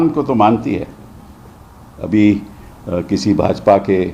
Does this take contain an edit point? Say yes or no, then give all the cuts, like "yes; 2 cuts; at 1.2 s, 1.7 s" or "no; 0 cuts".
no; 0 cuts